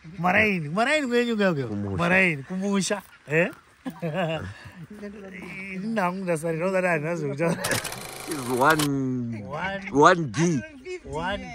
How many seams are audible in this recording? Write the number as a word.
one